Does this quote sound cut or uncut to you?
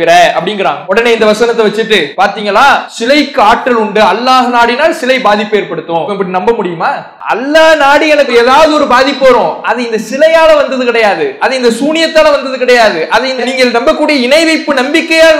cut